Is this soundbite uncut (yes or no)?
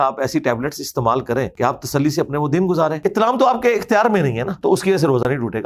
no